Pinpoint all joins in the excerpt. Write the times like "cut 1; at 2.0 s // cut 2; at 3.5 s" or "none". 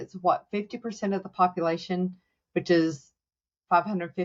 none